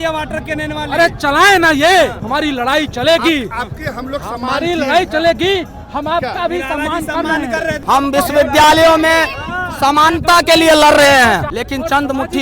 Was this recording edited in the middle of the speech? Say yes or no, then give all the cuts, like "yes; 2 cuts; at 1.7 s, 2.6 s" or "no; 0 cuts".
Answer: yes; 3 cuts; at 2.2 s, 7.7 s, 11.5 s